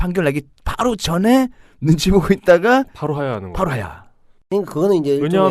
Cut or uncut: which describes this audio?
cut